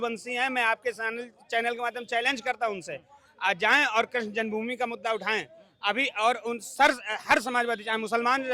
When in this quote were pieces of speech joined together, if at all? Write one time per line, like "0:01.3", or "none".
none